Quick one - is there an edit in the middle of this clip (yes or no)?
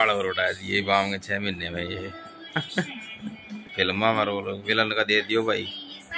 yes